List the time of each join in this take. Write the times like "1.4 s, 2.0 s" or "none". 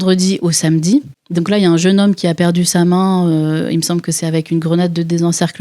none